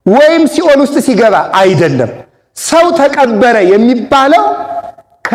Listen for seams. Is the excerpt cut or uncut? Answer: uncut